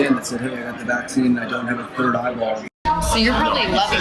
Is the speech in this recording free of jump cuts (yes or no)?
yes